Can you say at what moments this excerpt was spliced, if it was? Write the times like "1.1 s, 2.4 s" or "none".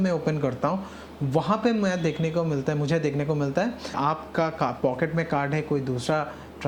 3.9 s